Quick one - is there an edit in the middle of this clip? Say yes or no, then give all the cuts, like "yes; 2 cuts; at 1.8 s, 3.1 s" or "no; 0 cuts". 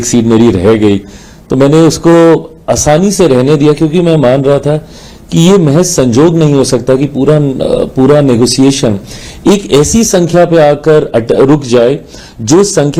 no; 0 cuts